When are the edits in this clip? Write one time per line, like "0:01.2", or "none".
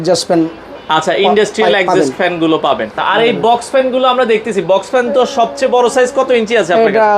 0:03.0